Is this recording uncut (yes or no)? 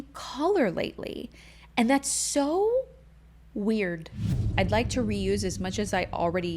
no